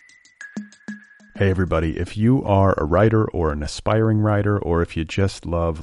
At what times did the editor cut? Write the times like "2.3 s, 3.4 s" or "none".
0.9 s